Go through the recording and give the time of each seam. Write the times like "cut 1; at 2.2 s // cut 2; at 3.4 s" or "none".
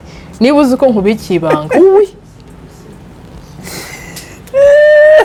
none